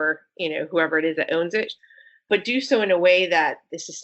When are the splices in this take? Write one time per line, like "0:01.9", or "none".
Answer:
0:01.8